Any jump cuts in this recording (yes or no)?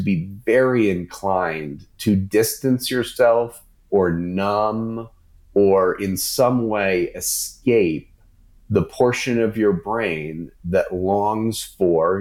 no